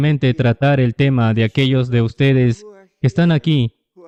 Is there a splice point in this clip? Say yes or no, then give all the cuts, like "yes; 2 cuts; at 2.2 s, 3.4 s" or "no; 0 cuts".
no; 0 cuts